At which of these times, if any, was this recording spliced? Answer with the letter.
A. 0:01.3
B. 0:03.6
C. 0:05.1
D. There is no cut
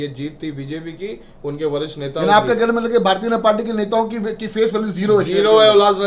D